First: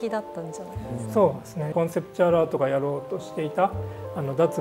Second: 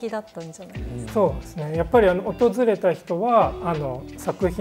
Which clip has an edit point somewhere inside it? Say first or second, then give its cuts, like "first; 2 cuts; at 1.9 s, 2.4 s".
first; 1 cut; at 1.7 s